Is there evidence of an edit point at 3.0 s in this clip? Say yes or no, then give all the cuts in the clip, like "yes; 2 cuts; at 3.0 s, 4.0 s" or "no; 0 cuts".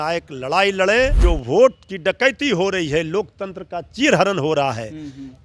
no; 1 cut; at 1.2 s